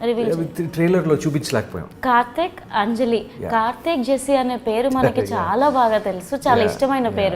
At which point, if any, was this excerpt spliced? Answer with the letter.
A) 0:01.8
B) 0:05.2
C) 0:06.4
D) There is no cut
A